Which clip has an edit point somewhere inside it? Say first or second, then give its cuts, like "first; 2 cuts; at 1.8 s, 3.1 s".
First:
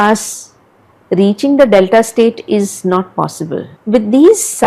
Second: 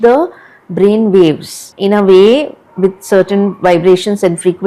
first; 1 cut; at 3.7 s